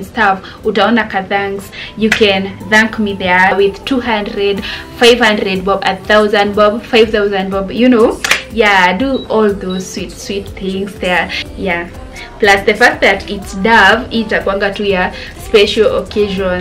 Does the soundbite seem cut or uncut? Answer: cut